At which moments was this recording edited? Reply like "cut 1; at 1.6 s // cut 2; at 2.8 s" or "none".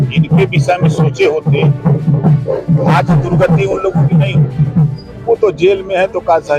cut 1; at 5.0 s